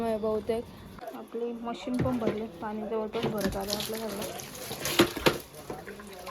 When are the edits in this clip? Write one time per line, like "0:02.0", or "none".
0:01.1